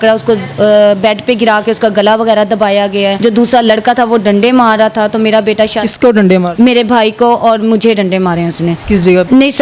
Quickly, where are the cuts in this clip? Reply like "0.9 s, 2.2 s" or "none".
none